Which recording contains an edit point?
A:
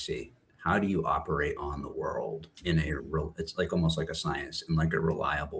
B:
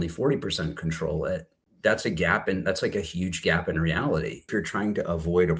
B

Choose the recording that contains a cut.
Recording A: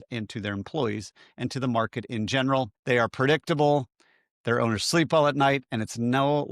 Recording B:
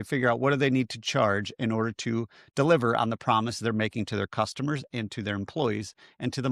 A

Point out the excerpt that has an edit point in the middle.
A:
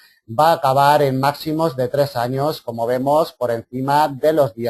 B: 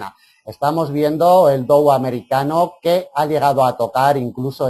B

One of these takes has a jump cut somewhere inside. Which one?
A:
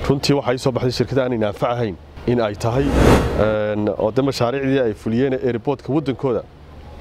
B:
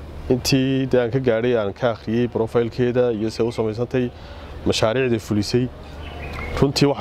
A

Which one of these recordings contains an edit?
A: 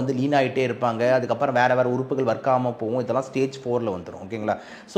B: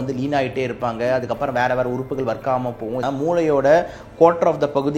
B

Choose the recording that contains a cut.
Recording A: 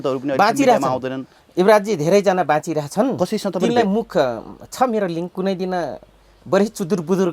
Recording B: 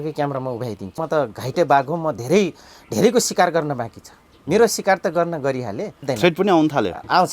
B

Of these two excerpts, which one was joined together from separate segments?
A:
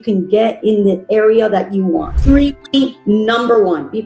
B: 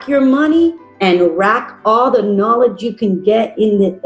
A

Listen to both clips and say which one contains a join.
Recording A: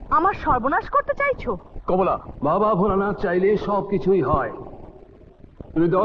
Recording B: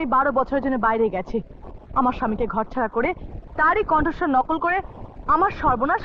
A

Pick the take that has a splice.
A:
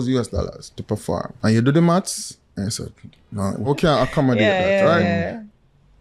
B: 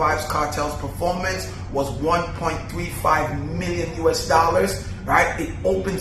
A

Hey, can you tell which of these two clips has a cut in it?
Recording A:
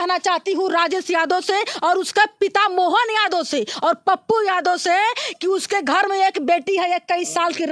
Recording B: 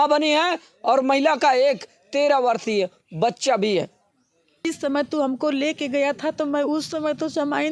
B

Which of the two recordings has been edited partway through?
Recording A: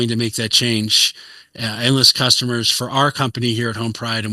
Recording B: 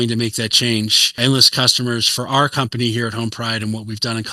B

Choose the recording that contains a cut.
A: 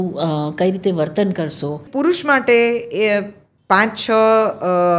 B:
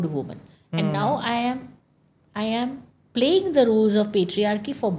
A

